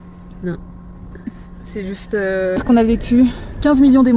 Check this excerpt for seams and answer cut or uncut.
cut